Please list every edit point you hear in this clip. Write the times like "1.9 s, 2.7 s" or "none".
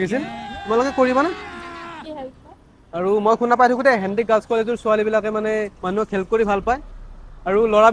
none